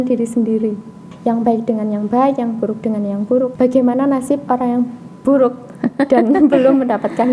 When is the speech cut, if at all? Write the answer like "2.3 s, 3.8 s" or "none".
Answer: 1.0 s, 3.5 s